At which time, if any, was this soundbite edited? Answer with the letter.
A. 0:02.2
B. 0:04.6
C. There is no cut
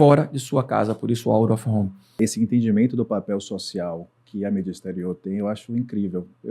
A